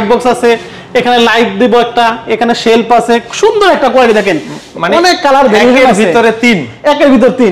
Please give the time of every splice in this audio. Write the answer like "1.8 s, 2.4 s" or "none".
none